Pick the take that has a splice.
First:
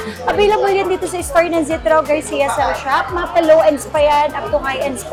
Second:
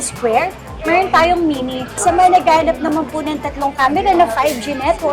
second; 1 cut; at 2.0 s

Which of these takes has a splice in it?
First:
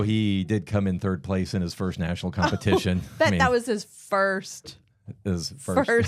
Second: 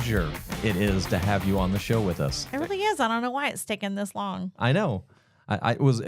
second; 1 cut; at 1.0 s

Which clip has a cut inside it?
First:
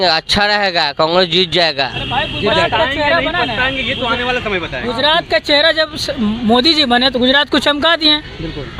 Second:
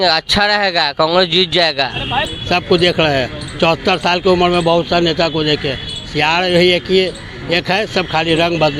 second; 1 cut; at 2.3 s

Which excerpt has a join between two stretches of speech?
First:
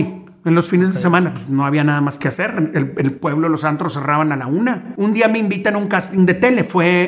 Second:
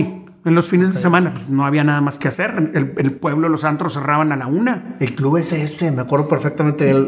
first; 1 cut; at 4.9 s

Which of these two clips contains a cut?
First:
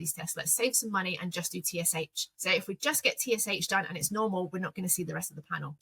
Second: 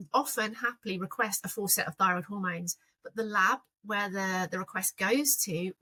first; 1 cut; at 2.2 s

